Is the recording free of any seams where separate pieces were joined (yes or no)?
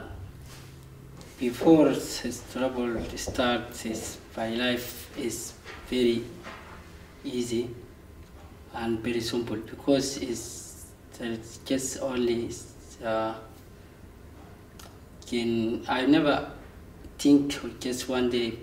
no